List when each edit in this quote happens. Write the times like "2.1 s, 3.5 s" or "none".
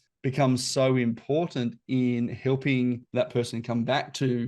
3.0 s